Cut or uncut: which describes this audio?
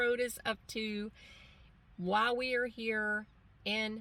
uncut